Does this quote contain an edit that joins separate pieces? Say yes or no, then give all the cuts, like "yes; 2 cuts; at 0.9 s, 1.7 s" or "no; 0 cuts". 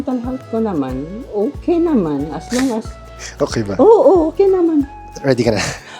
yes; 2 cuts; at 1.2 s, 5.0 s